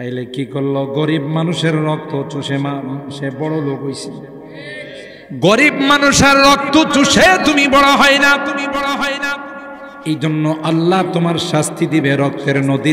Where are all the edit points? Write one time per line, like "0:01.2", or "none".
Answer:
none

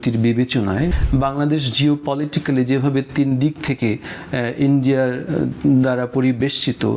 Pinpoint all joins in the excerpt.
0:00.9

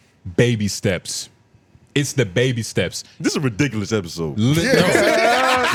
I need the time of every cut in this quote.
none

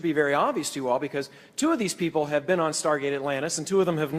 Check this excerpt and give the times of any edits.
0:01.4

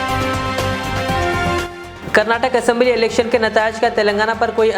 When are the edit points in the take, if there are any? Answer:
none

